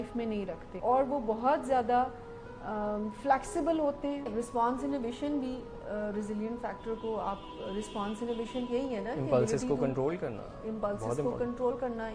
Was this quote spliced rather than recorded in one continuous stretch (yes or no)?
yes